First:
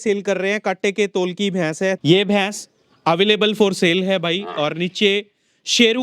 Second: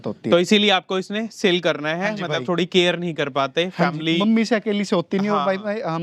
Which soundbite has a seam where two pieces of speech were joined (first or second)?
first